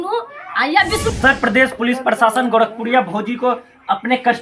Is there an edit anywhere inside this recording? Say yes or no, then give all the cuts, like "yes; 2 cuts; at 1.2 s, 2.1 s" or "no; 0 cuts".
yes; 1 cut; at 1.1 s